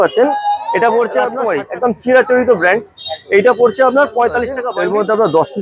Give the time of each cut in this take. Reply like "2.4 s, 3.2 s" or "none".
1.4 s, 4.6 s